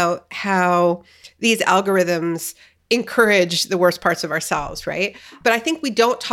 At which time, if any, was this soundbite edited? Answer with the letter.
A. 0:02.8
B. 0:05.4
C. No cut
B